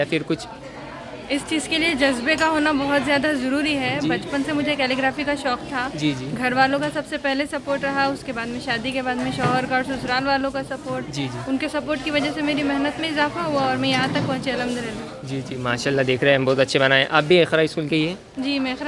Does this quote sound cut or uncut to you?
uncut